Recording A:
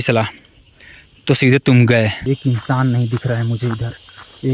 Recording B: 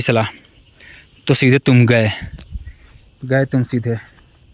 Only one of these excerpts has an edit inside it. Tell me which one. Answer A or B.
A